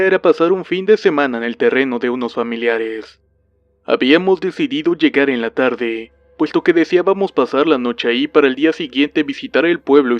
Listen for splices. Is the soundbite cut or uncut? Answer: cut